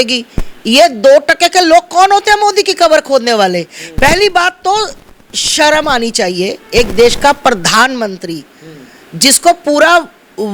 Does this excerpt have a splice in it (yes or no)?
no